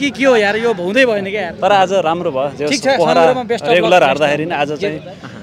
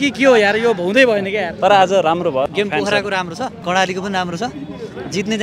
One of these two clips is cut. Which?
second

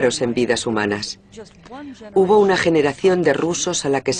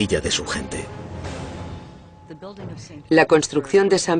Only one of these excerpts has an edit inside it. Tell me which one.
first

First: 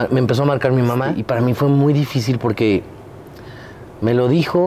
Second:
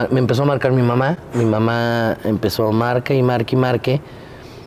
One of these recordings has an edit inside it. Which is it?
first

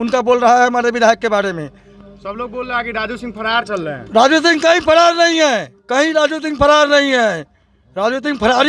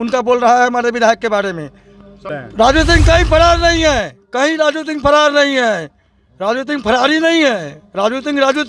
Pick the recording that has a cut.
second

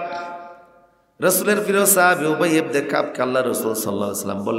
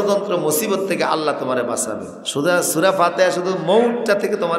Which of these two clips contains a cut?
second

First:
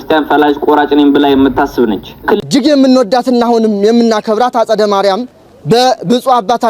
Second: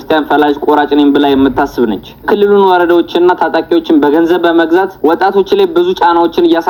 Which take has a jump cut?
first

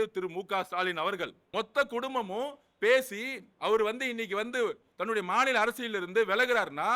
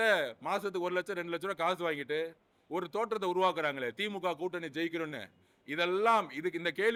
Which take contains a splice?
first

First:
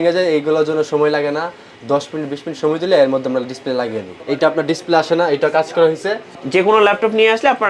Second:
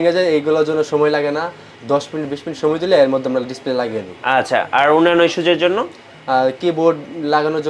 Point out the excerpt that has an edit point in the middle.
first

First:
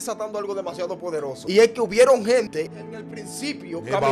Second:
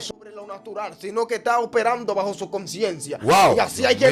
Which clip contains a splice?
first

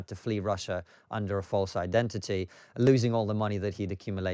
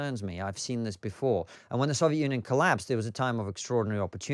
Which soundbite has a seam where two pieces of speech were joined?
second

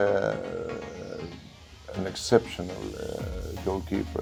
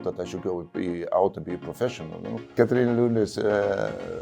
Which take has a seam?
second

